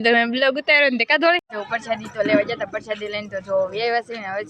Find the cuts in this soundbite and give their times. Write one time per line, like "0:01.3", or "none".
0:01.5